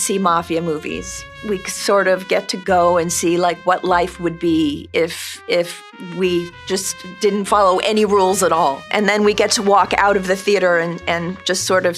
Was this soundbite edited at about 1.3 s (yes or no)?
yes